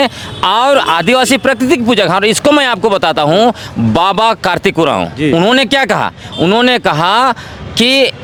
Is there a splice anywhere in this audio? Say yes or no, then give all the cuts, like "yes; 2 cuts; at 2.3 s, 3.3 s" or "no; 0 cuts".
no; 0 cuts